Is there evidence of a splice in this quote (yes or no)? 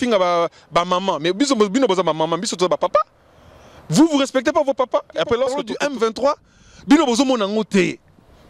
yes